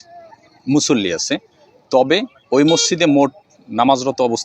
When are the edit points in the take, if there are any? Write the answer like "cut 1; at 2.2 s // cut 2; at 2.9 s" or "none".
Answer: cut 1; at 3.5 s